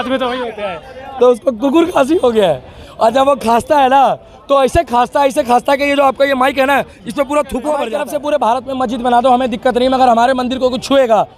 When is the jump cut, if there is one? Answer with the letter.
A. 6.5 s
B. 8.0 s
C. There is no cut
B